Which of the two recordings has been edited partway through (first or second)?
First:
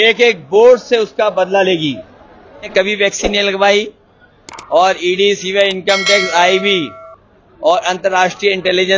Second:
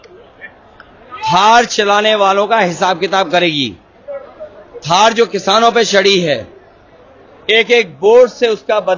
first